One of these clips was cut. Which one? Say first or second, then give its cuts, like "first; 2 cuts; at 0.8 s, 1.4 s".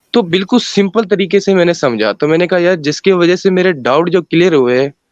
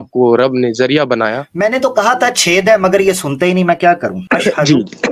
second; 2 cuts; at 1.5 s, 4.2 s